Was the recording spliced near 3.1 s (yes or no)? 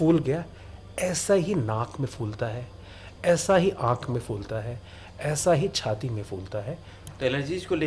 no